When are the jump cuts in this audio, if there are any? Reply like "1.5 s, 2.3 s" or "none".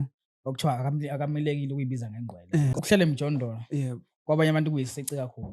2.7 s